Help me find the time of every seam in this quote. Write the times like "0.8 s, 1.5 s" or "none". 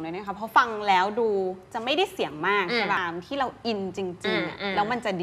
3.0 s